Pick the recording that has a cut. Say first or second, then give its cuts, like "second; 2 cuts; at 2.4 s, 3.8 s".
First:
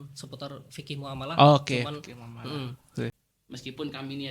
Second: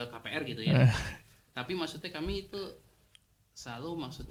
first; 1 cut; at 3.2 s